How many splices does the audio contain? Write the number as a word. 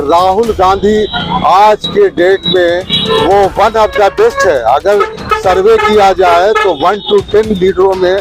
zero